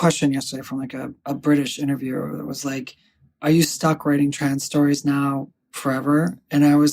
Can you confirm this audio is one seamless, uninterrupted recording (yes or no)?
no